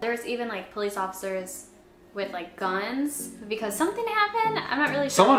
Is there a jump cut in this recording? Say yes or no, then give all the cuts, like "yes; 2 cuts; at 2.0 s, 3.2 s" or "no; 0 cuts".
no; 0 cuts